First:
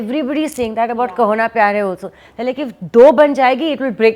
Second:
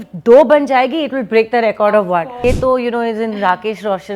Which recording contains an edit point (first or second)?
second